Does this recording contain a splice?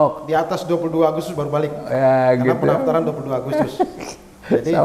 no; 0 cuts

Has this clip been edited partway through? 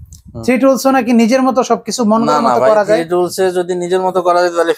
no; 0 cuts

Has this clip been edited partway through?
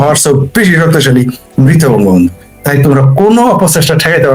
no; 0 cuts

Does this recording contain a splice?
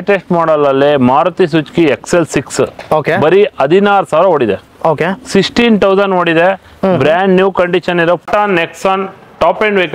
yes; 1 cut; at 8.2 s

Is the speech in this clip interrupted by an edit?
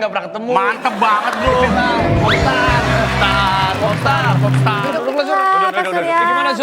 no; 0 cuts

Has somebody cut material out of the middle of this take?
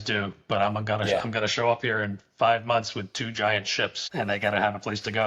yes; 1 cut; at 4.0 s

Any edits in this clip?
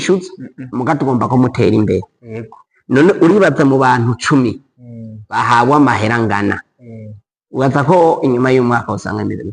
no; 0 cuts

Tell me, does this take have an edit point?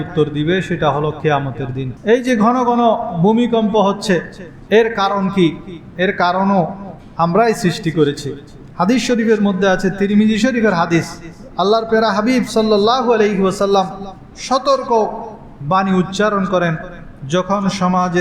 yes; 1 cut; at 1.8 s

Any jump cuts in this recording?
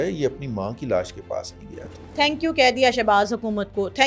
yes; 1 cut; at 2.0 s

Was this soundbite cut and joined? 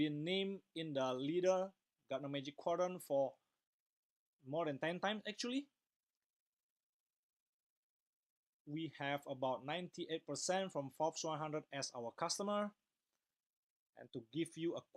no; 0 cuts

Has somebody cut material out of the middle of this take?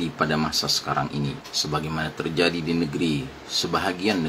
yes; 1 cut; at 1.5 s

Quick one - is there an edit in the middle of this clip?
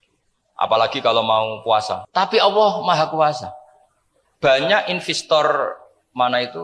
yes; 1 cut; at 2.0 s

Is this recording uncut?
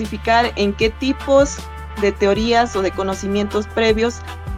yes; 0 cuts

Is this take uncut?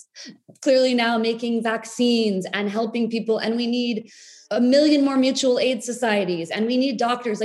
no; 1 cut; at 4.4 s

